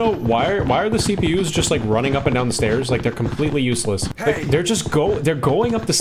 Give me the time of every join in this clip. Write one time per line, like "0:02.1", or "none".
0:04.1